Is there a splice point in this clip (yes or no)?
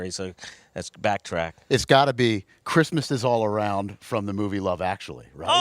yes